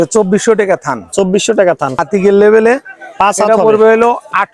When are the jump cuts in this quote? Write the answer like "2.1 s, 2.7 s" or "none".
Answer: 1.9 s